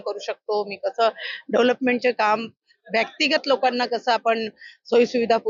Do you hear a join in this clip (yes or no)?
no